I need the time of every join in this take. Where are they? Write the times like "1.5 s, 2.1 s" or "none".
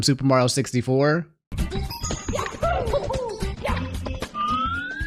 none